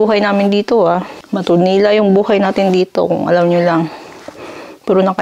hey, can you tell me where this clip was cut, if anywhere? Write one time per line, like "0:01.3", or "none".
0:01.2